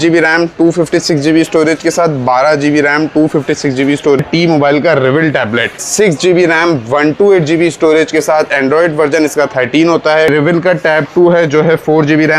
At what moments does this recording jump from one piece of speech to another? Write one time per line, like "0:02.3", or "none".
0:04.2
0:05.8
0:10.3